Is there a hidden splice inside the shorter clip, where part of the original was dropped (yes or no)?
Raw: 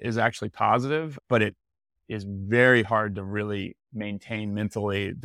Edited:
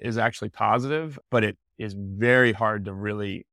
yes